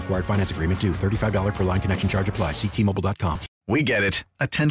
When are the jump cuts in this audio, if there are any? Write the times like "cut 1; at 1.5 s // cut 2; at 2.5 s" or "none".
cut 1; at 3.5 s